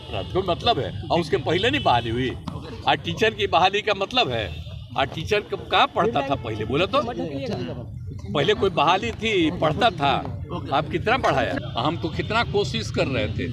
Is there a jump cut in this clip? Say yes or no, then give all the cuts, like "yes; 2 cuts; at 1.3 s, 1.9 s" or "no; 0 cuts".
yes; 1 cut; at 11.6 s